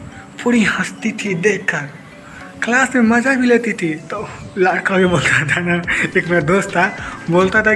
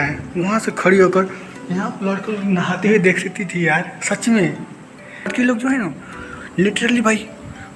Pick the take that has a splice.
second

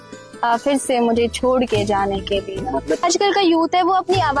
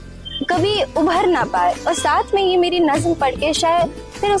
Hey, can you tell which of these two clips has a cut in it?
first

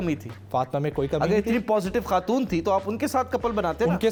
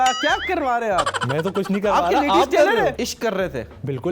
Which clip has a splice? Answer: second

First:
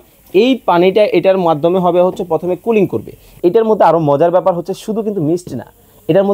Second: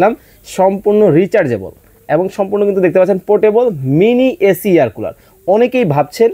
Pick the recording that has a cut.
first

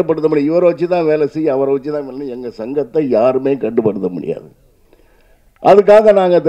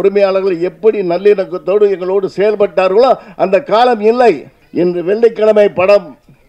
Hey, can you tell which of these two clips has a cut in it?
second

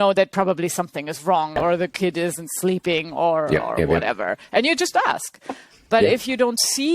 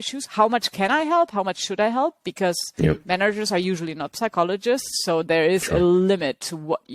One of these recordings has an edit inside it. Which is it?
first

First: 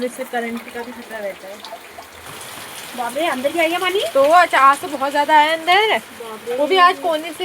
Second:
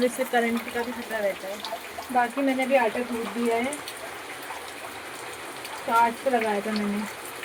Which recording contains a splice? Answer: first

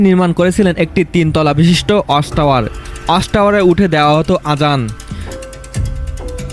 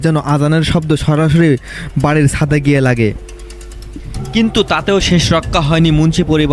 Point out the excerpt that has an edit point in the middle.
first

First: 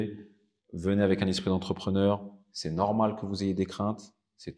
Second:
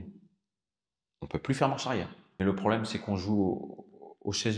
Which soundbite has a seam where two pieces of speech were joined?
second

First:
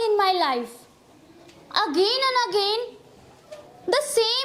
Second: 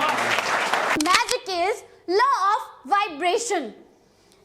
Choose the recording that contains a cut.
second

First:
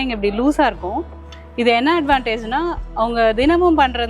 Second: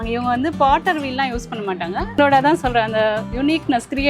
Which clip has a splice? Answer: second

